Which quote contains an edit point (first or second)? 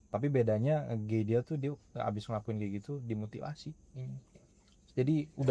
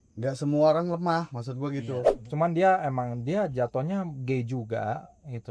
second